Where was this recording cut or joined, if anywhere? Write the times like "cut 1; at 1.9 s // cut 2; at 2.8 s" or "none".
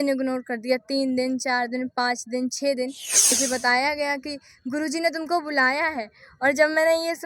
cut 1; at 3.3 s